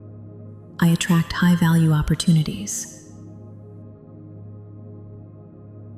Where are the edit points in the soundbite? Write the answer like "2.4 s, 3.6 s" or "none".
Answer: 0.8 s, 2.7 s, 5.1 s